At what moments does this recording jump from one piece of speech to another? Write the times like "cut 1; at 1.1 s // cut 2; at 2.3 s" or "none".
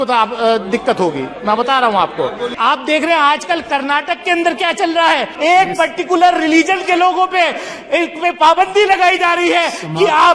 cut 1; at 2.5 s // cut 2; at 5.3 s

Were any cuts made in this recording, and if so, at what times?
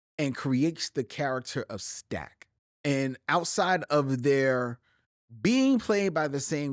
cut 1; at 2.7 s

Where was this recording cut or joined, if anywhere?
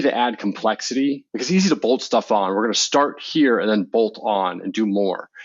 cut 1; at 1.3 s

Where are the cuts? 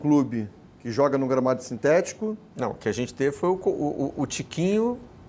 none

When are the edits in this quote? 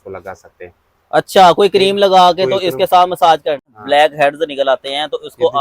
cut 1; at 3.7 s

